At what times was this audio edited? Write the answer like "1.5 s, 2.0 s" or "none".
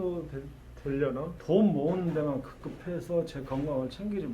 1.4 s

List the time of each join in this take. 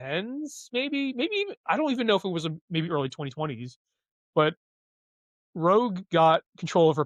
none

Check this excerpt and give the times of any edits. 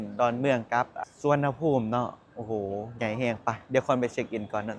1.0 s

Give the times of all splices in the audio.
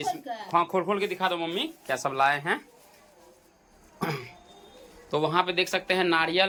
none

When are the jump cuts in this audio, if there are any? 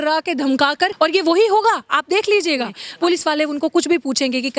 0.9 s, 2.8 s

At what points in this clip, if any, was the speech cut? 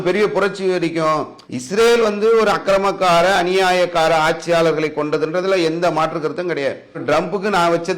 1.4 s, 7.0 s

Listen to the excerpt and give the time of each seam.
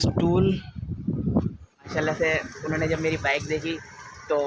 1.9 s

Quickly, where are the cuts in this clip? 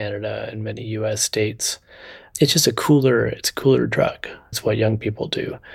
2.3 s, 4.5 s

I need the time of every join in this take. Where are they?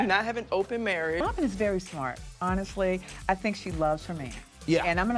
1.2 s

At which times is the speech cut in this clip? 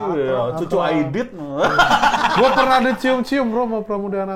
none

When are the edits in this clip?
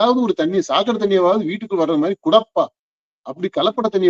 none

